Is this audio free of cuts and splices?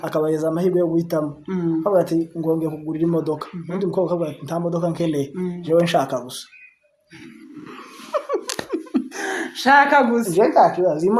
yes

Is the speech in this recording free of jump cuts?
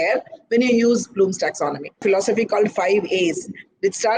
no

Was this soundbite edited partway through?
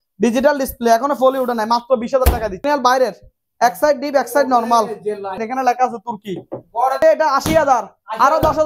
yes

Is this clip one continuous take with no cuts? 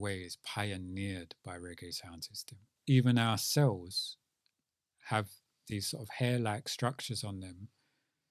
no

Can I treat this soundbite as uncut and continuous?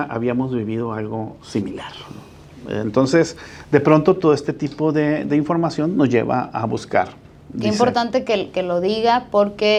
yes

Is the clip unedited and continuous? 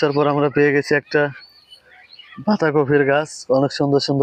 yes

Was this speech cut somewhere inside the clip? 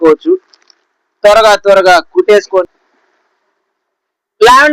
yes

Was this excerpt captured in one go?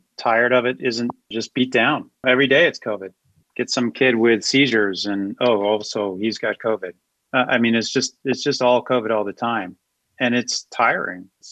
yes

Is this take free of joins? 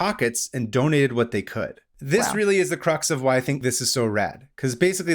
no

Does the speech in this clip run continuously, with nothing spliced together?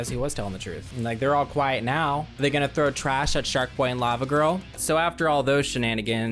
no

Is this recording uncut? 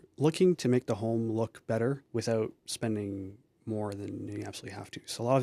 no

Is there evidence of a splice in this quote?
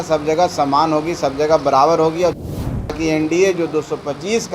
yes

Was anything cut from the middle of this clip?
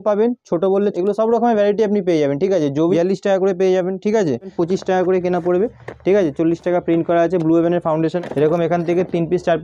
yes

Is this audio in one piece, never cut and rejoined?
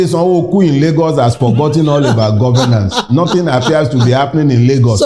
yes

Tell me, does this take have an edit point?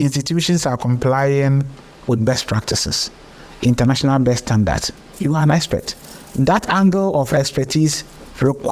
no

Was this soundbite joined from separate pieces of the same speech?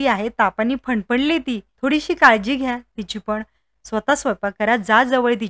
yes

